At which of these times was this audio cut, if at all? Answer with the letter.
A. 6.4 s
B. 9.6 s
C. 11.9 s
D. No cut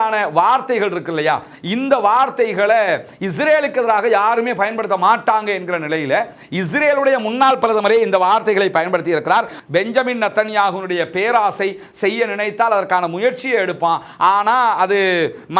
B